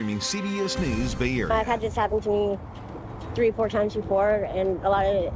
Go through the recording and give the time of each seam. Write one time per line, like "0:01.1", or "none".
0:01.5

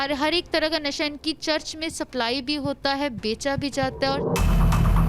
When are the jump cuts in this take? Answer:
0:04.2

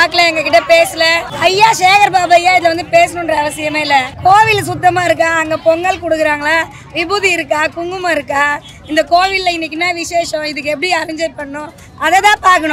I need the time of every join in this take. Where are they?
0:01.2

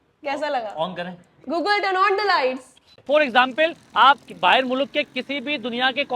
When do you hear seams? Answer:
0:03.0

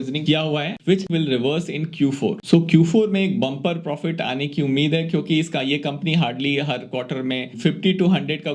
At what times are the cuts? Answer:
0:01.0
0:02.4

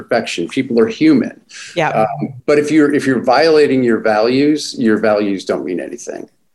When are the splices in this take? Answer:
none

